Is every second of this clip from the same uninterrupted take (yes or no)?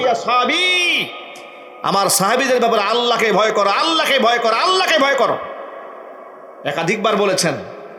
yes